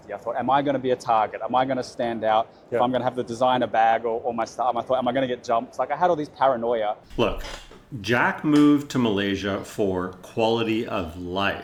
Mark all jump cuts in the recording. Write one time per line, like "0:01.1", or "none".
none